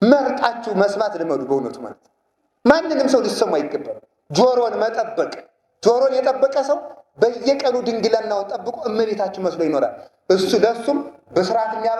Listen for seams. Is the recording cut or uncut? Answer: uncut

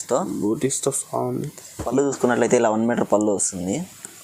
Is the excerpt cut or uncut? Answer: cut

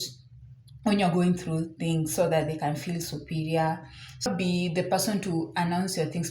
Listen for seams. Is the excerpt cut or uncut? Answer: cut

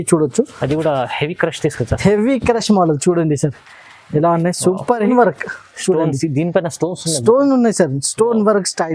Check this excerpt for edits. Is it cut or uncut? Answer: cut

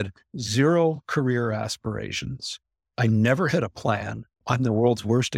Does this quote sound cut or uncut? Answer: cut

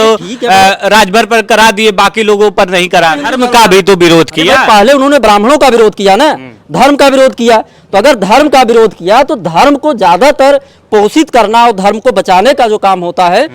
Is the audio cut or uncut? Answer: cut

